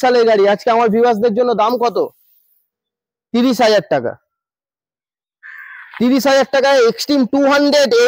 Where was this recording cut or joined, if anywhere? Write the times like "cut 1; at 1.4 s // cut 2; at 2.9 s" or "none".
none